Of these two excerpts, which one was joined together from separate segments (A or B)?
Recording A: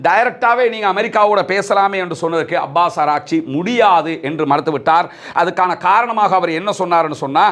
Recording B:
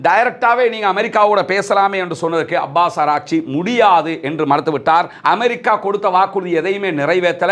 B